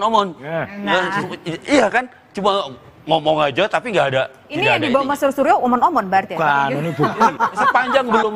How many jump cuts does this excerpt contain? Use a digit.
0